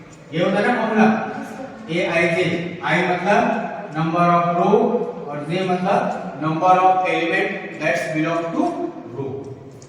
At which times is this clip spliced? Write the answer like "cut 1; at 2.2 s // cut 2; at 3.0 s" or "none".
none